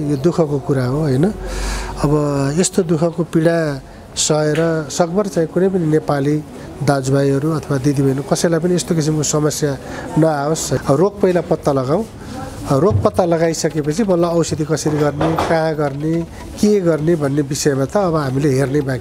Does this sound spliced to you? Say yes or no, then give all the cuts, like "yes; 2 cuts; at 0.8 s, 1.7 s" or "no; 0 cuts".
yes; 1 cut; at 10.8 s